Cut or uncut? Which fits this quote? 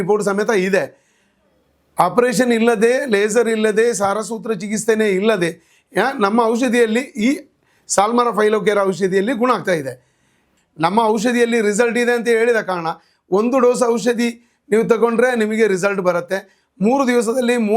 cut